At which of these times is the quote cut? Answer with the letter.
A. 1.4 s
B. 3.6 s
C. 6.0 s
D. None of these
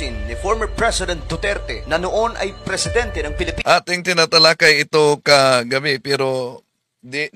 D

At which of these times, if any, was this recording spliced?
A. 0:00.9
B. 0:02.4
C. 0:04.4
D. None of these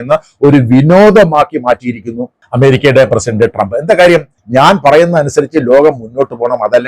C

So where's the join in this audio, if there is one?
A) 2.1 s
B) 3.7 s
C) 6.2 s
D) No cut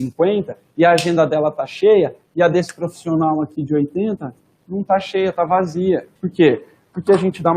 C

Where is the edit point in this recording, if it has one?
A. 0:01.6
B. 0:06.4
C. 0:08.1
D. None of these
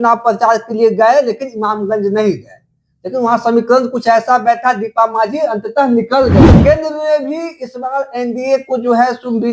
B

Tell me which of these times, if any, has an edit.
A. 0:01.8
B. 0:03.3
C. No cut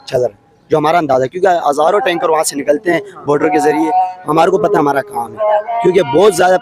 C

